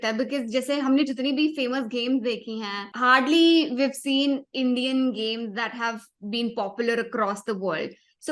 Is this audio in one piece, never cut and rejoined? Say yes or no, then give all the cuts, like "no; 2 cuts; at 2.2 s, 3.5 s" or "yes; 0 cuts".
no; 1 cut; at 2.8 s